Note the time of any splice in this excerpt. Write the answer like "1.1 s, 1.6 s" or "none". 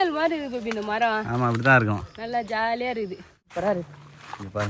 3.5 s